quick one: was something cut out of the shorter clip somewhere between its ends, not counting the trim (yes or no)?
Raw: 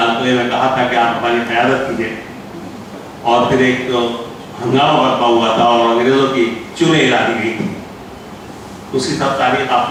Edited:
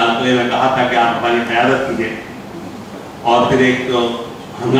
no